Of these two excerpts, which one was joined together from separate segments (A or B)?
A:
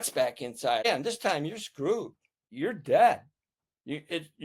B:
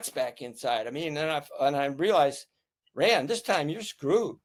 A